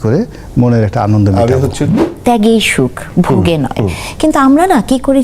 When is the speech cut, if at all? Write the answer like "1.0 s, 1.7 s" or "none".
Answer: 2.1 s